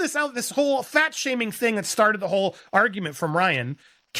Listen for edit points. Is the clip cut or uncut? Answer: uncut